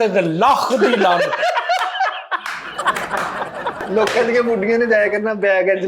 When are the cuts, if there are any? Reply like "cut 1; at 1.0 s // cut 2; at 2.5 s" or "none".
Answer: cut 1; at 3.8 s